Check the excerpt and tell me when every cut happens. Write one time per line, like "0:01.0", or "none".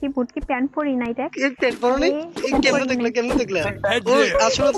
none

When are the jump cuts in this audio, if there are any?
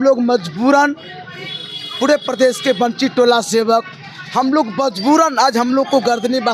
none

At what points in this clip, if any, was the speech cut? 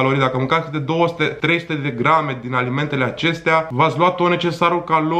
0:01.4
0:03.7

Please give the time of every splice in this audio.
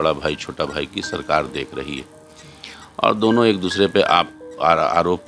none

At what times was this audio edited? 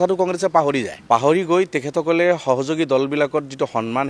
0:00.9

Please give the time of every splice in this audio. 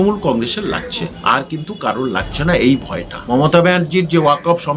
0:03.1

